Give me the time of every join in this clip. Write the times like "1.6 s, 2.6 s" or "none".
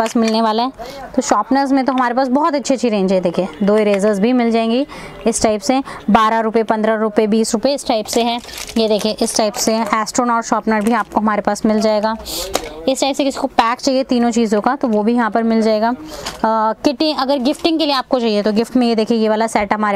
none